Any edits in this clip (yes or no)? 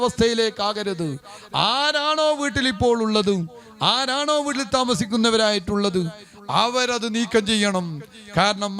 no